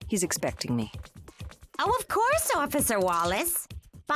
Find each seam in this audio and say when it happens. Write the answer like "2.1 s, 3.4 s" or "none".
none